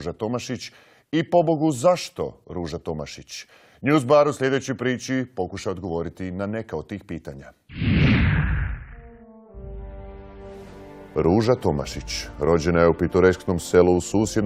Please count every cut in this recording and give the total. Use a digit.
1